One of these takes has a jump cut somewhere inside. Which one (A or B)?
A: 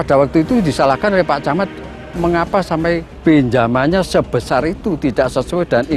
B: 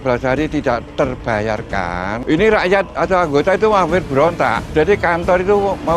B